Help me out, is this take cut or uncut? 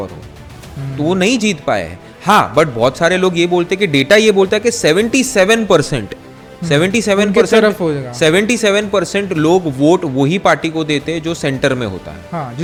uncut